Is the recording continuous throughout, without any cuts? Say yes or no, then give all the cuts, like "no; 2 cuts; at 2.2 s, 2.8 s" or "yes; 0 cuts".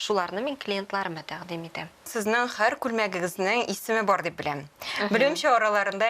no; 1 cut; at 2.1 s